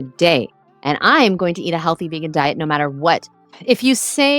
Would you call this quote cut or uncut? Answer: cut